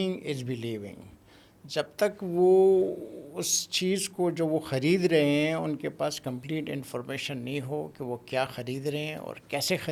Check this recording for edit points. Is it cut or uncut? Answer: uncut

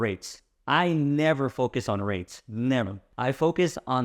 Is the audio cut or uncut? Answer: cut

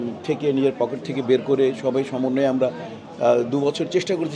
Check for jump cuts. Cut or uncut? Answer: uncut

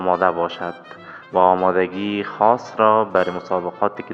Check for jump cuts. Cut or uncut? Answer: uncut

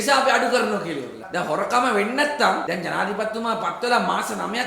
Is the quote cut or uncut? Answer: cut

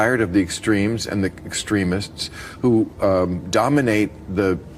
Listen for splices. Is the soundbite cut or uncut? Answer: uncut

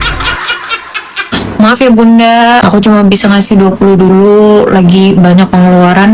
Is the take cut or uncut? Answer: cut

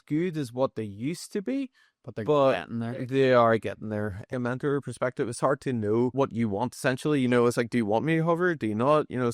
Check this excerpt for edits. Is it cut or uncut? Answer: cut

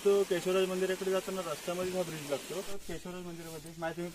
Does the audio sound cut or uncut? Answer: cut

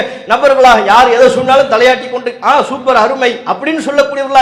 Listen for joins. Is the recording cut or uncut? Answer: uncut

